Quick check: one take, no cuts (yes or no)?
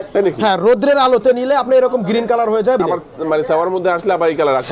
yes